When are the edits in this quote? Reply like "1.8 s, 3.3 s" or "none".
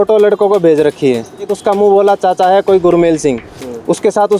1.6 s